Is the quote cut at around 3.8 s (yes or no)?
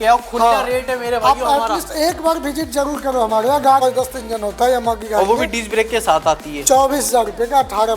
yes